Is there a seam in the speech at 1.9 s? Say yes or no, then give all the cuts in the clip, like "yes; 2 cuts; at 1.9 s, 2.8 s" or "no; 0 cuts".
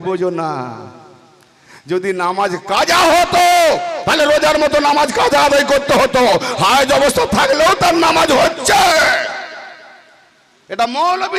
no; 0 cuts